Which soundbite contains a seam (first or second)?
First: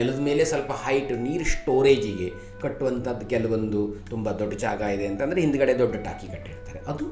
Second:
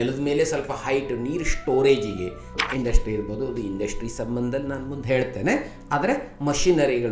second